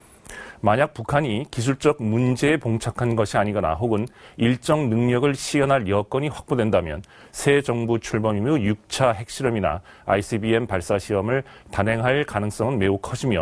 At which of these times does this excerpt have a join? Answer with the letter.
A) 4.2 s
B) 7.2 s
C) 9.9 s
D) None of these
A